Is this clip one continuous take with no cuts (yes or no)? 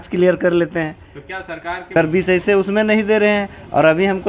no